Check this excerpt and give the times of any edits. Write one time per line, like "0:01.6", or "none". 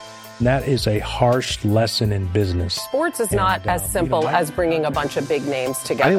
none